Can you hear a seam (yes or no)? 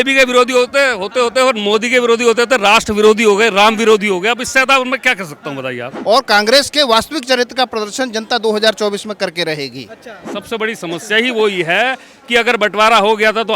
yes